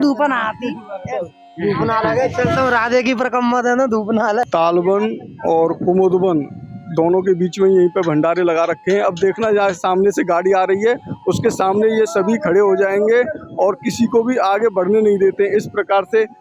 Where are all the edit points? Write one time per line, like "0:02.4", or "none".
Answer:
0:04.5